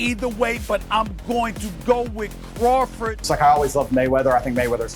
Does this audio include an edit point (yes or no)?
yes